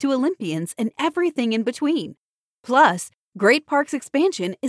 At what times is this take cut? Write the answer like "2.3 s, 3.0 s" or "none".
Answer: none